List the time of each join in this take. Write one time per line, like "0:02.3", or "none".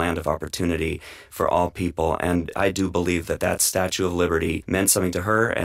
0:02.5
0:04.6